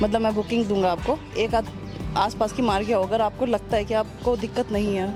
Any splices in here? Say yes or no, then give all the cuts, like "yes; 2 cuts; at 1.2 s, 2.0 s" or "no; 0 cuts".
no; 0 cuts